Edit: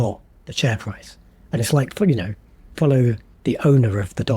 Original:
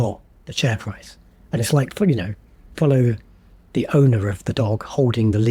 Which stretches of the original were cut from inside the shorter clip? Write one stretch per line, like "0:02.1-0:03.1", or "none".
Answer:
0:03.3-0:03.6